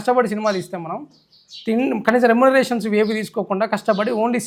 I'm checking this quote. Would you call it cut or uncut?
uncut